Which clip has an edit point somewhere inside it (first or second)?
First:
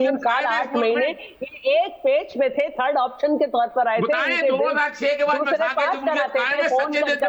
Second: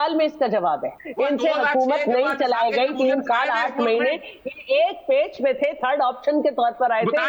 second